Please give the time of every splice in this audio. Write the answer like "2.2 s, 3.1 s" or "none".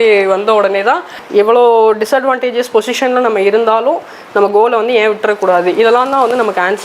1.1 s